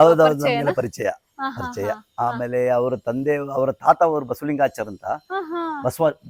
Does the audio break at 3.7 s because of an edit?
no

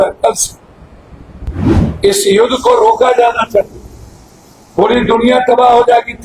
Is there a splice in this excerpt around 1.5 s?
yes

